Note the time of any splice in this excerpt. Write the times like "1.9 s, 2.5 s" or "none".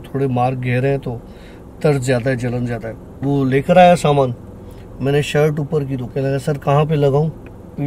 3.1 s, 6.1 s